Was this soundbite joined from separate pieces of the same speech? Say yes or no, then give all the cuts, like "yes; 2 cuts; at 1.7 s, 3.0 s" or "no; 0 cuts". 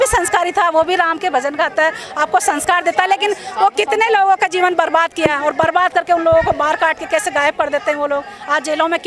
no; 0 cuts